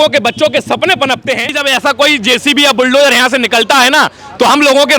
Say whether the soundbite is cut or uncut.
cut